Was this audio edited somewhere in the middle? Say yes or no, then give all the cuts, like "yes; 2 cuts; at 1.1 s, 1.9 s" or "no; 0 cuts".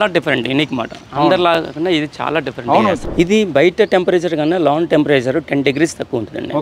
yes; 1 cut; at 3.0 s